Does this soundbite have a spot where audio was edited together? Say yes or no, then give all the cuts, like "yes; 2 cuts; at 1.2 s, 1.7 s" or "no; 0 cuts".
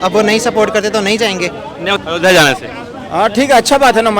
yes; 1 cut; at 2.0 s